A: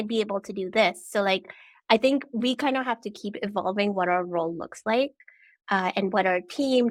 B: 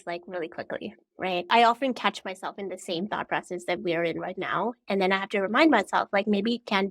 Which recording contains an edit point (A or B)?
B